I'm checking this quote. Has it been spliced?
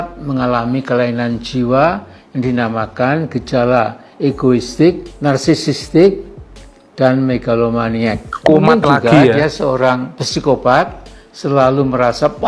no; 0 cuts

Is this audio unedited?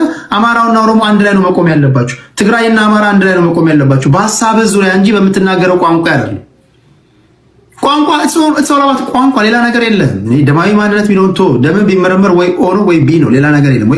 yes; 0 cuts

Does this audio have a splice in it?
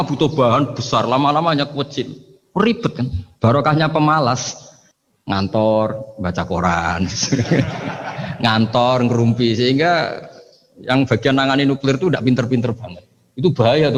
no; 0 cuts

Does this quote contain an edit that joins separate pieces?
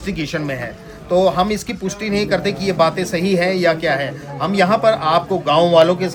no; 0 cuts

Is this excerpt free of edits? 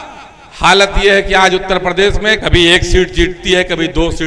no; 1 cut; at 2.4 s

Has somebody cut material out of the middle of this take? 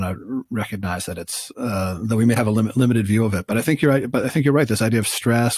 no; 0 cuts

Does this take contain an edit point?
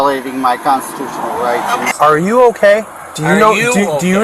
yes; 1 cut; at 1.9 s

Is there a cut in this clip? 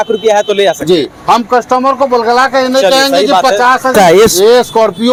no; 0 cuts

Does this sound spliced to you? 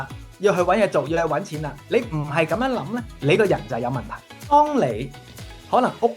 yes; 1 cut; at 4.2 s

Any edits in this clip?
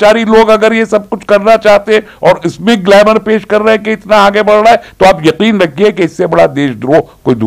no; 0 cuts

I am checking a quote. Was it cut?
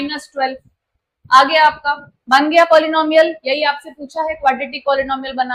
no; 0 cuts

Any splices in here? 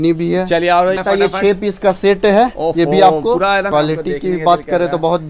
yes; 2 cuts; at 1.0 s, 3.7 s

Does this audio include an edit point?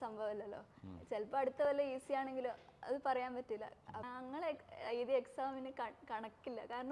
yes; 1 cut; at 4.1 s

